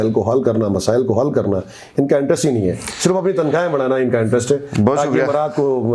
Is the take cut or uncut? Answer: uncut